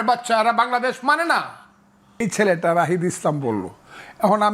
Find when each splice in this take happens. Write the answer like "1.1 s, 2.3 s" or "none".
2.2 s